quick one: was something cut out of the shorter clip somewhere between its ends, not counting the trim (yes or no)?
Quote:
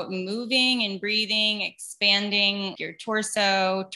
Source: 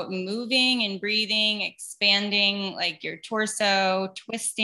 yes